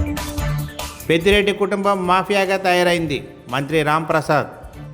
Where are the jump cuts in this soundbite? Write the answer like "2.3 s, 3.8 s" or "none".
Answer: 1.0 s